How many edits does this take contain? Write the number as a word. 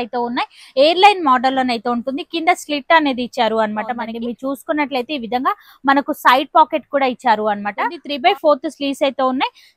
two